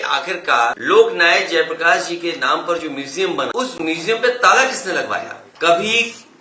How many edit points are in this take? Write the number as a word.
three